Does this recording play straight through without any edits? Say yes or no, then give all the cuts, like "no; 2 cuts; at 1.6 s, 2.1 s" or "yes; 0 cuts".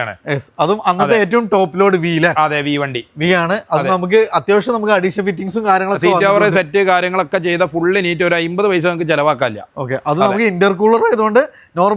yes; 0 cuts